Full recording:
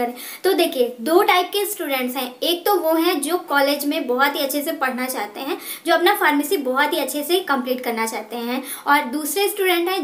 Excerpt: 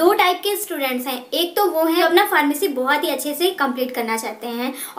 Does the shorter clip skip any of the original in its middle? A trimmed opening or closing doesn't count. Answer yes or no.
yes